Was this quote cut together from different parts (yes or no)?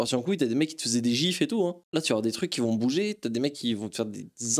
no